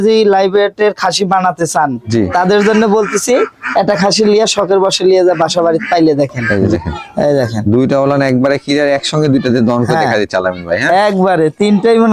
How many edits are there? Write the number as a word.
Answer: two